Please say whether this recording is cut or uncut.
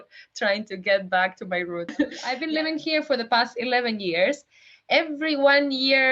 cut